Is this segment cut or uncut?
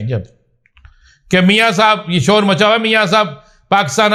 uncut